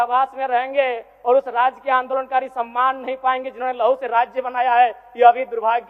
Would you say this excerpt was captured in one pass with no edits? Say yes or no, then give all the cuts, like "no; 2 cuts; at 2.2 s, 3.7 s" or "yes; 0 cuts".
yes; 0 cuts